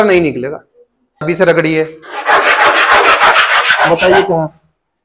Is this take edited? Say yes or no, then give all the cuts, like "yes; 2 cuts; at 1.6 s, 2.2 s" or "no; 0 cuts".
yes; 1 cut; at 1.2 s